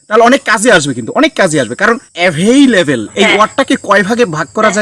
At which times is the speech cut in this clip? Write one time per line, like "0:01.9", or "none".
0:02.1